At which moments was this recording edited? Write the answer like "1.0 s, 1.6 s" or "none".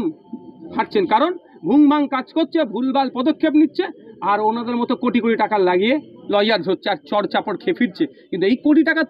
none